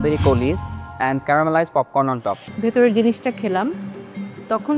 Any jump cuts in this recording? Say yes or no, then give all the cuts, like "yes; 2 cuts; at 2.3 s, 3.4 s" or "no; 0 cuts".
yes; 1 cut; at 2.4 s